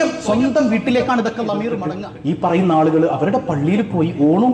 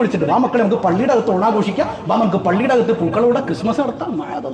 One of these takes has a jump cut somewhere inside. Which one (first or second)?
first